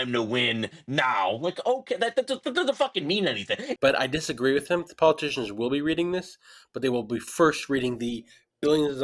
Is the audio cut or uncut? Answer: cut